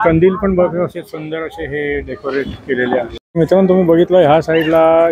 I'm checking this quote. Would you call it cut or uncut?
uncut